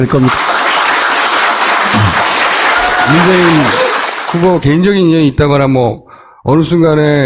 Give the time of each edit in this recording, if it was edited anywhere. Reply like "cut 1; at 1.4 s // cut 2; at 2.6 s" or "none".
cut 1; at 5.8 s